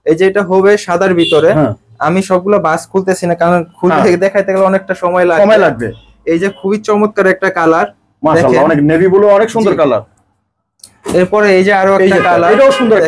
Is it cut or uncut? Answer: uncut